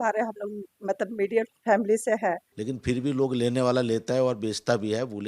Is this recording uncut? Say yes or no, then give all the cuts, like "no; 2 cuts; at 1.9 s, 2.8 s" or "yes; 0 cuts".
no; 1 cut; at 2.5 s